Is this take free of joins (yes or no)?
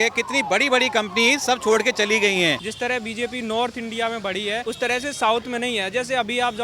no